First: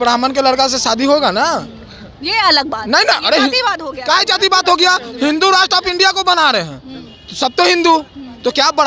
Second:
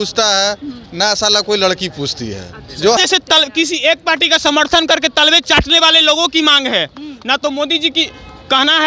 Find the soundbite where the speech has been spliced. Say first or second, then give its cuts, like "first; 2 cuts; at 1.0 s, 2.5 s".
second; 1 cut; at 3.0 s